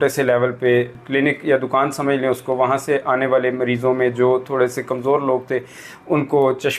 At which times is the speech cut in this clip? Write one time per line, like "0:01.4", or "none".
0:00.9